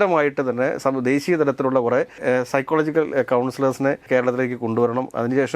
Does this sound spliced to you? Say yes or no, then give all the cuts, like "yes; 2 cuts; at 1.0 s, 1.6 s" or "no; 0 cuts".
yes; 2 cuts; at 2.1 s, 4.1 s